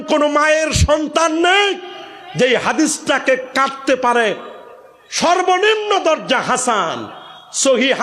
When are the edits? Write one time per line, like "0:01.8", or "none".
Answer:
none